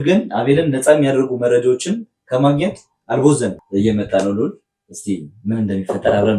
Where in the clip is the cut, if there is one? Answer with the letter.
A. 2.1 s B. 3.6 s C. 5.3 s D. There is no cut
B